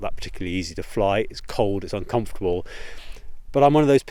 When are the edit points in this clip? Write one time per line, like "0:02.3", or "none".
none

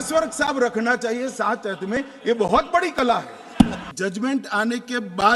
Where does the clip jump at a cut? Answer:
0:03.8

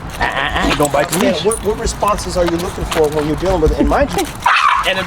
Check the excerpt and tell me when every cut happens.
0:04.1

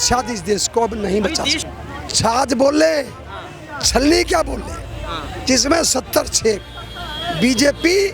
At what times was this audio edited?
0:01.6

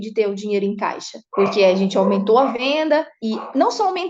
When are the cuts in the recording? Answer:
0:01.2
0:02.6

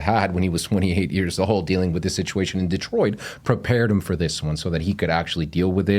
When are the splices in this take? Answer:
none

